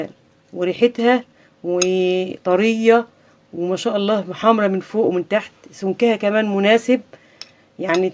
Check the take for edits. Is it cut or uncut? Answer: uncut